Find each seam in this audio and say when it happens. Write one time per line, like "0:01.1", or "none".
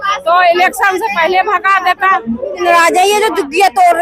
0:02.6